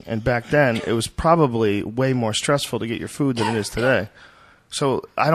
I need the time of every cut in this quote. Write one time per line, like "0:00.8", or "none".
0:03.2